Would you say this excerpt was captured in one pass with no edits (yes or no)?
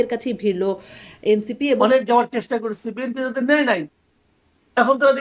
no